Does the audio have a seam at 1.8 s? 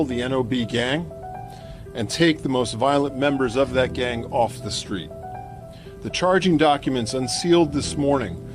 no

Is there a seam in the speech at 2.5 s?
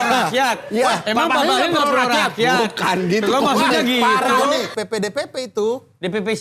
no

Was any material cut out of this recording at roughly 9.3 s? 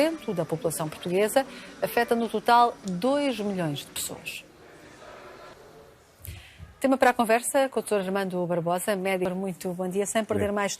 yes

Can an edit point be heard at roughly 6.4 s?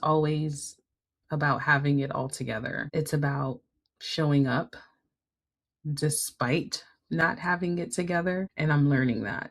no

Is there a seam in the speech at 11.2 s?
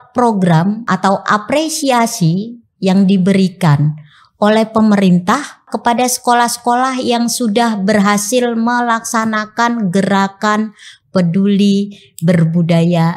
no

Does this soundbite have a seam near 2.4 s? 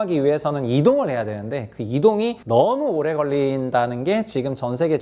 yes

